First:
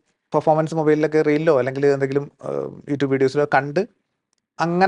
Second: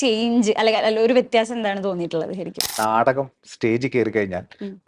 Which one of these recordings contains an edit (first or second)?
second